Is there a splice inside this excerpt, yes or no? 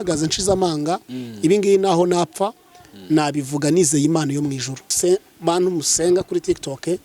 yes